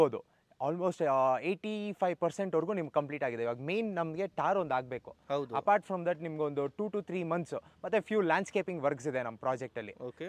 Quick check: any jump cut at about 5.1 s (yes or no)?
no